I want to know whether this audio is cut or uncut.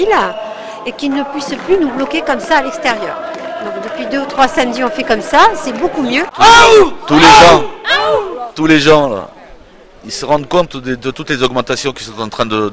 cut